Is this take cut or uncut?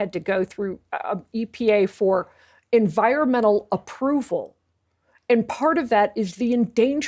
uncut